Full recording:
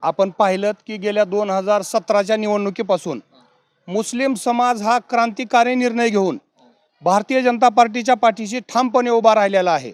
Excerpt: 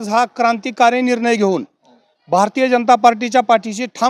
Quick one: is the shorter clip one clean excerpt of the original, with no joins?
yes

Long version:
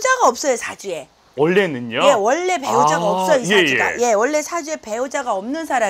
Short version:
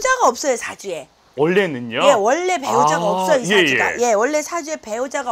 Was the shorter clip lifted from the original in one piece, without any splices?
yes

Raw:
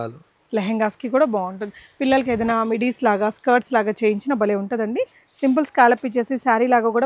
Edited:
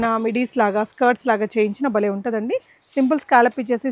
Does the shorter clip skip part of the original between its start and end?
no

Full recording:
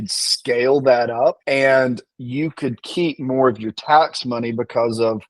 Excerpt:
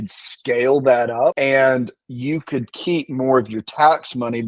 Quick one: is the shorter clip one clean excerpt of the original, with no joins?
no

